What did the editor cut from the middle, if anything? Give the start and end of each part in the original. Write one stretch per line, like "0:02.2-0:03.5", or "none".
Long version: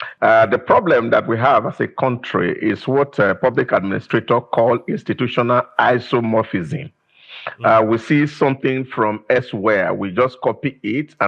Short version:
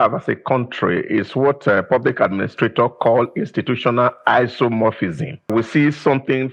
0:07.0-0:07.9